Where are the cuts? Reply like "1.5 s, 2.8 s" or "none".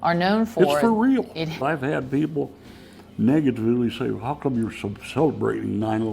1.6 s